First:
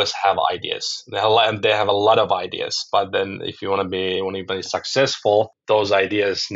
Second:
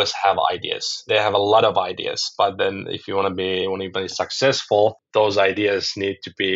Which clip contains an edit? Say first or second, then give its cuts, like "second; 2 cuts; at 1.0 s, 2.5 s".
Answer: second; 1 cut; at 1.0 s